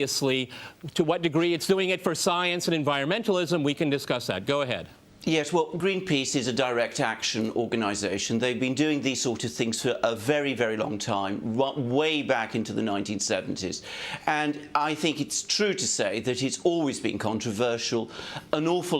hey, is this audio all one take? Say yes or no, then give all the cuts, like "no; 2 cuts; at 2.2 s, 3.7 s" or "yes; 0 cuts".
no; 1 cut; at 12.8 s